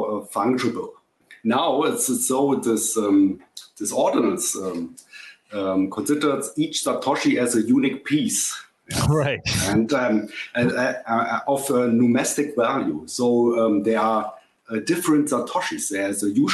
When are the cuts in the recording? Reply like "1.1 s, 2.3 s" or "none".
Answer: 1.3 s